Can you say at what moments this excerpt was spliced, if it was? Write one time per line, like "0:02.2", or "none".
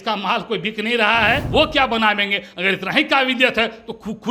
0:01.4